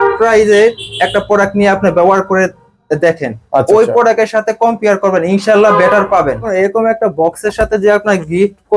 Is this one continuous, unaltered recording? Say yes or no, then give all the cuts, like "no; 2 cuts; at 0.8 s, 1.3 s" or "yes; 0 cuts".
no; 1 cut; at 6.5 s